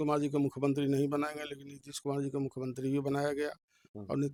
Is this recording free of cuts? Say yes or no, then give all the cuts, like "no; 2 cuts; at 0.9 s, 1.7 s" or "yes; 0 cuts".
yes; 0 cuts